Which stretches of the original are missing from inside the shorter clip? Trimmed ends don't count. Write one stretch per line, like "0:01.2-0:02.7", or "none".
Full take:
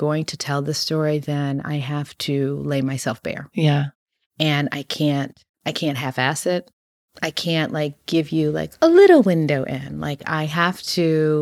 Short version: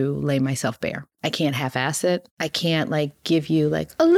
0:03.4-0:05.4
0:06.8-0:07.2